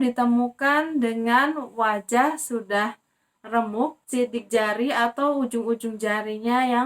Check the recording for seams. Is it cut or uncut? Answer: cut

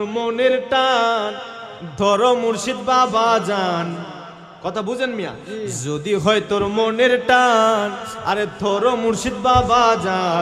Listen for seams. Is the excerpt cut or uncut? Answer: uncut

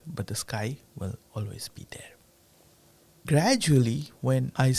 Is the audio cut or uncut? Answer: cut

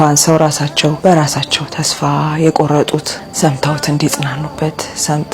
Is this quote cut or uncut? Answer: cut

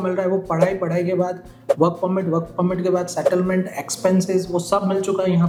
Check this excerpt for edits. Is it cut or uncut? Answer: uncut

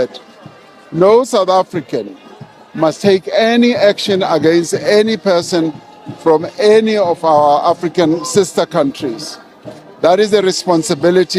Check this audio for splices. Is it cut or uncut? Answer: uncut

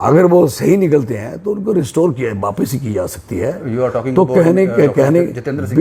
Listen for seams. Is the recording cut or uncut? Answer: uncut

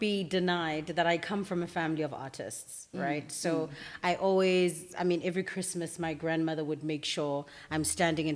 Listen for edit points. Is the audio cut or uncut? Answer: uncut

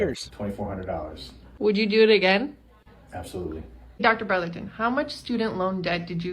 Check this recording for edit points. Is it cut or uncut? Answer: cut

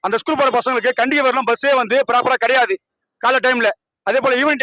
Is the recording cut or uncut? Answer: uncut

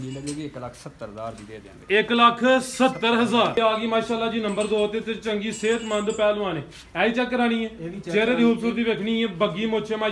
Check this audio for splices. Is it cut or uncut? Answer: cut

